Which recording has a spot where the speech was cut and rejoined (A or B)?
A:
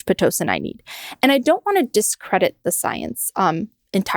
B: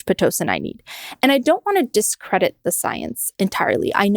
B